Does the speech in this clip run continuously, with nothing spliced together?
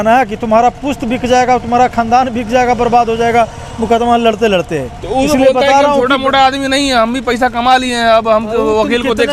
yes; 0 cuts

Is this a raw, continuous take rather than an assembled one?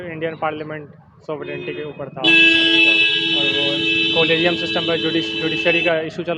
yes; 0 cuts

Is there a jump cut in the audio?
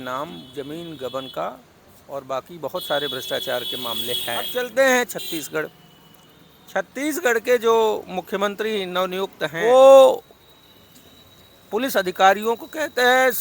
yes; 2 cuts; at 4.5 s, 9.6 s

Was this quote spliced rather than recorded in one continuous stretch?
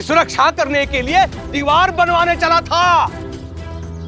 no; 0 cuts

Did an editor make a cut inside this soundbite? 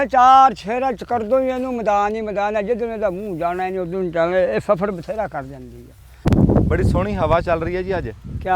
yes; 1 cut; at 6.3 s

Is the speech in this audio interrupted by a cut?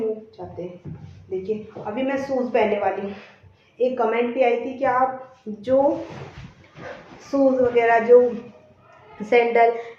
no; 0 cuts

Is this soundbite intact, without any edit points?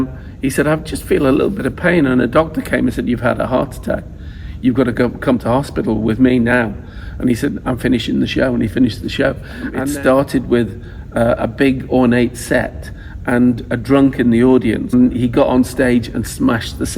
no; 2 cuts; at 9.7 s, 14.9 s

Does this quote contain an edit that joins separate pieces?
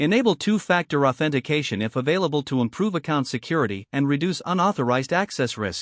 no; 0 cuts

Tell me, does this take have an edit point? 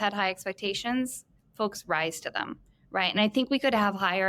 no; 0 cuts

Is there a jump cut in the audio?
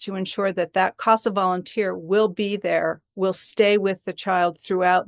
no; 0 cuts

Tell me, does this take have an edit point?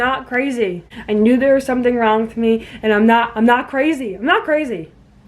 yes; 1 cut; at 0.9 s

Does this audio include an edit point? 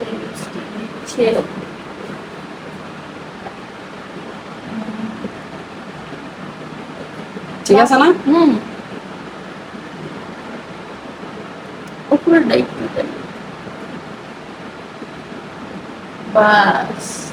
no; 0 cuts

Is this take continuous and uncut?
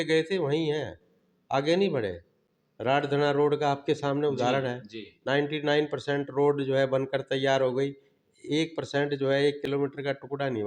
yes; 0 cuts

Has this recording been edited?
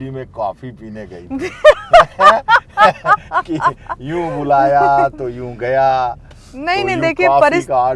no; 0 cuts

